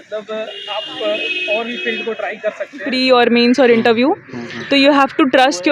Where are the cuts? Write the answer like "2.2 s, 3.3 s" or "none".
2.9 s